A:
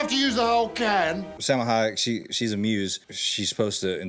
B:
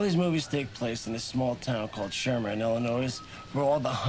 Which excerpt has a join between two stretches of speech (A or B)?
A